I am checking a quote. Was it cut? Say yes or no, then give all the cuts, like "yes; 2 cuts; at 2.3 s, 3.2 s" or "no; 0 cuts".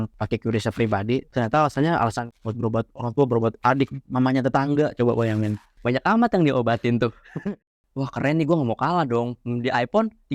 yes; 3 cuts; at 1.3 s, 4.0 s, 7.7 s